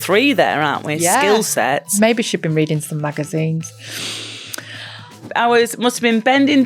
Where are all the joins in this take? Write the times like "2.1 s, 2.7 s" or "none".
2.0 s, 5.2 s